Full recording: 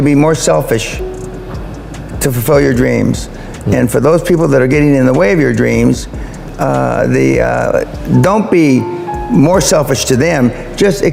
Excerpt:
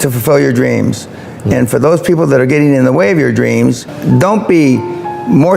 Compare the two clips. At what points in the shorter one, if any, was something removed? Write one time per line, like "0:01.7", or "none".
0:03.9